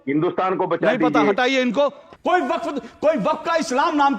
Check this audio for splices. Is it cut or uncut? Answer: cut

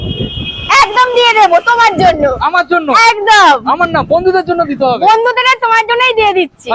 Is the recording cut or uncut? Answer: uncut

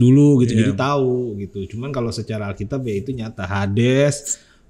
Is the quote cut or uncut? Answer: uncut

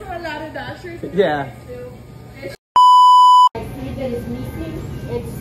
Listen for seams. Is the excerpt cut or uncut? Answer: cut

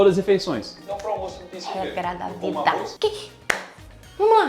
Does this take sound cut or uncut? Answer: cut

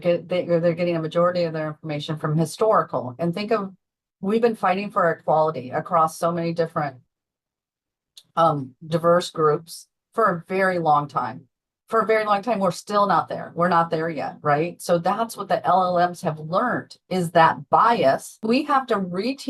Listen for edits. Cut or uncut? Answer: cut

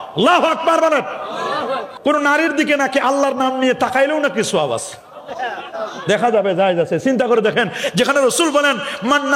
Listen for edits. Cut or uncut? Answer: cut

